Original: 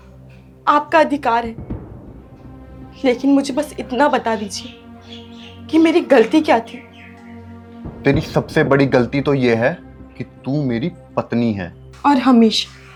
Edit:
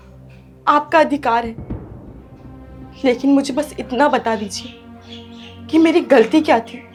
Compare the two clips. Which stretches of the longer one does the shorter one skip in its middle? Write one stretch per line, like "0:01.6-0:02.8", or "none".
none